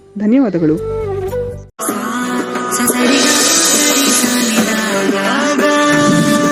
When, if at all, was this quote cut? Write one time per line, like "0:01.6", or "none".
0:01.6

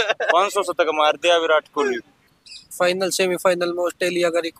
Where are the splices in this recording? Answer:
0:02.1

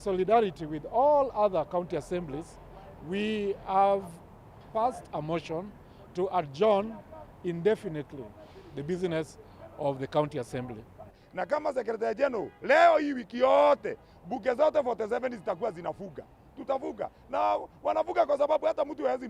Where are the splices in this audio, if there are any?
0:11.2

